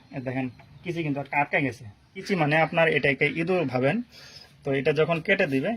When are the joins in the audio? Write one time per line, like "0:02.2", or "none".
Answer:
0:02.2